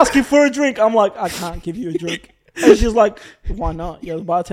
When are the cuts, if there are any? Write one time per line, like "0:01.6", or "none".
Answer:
none